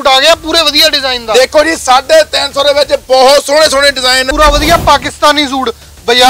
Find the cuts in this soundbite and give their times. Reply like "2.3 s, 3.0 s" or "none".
4.3 s